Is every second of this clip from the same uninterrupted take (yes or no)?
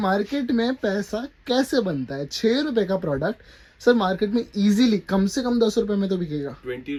yes